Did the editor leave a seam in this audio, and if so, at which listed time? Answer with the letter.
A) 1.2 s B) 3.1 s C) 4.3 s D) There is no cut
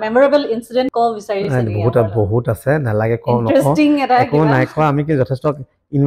A